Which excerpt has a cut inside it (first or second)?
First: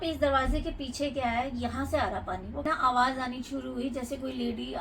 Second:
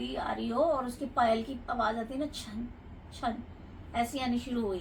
first